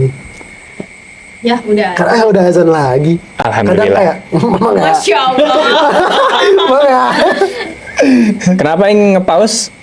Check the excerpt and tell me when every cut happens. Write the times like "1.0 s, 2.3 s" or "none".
none